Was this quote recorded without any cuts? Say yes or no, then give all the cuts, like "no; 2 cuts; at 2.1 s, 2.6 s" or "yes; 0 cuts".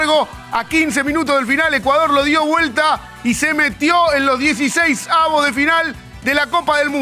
yes; 0 cuts